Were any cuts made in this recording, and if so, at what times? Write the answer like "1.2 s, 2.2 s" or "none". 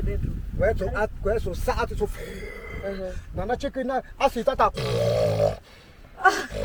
none